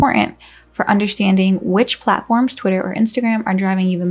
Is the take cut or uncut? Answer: uncut